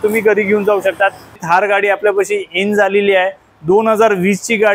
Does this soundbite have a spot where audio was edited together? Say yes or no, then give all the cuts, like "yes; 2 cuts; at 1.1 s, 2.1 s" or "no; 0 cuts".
yes; 1 cut; at 1.4 s